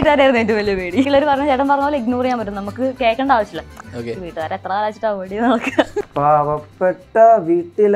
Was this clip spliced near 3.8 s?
yes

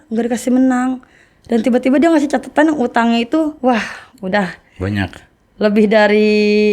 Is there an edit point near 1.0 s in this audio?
no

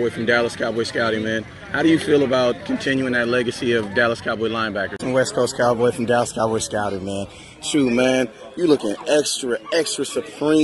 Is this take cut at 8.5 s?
yes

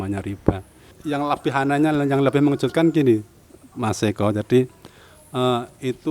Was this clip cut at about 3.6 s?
no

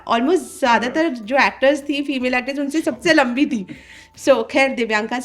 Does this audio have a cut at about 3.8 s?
no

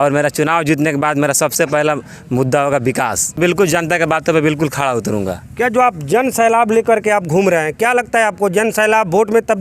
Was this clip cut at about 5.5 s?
no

